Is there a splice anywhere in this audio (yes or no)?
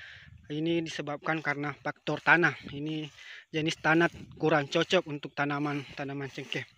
no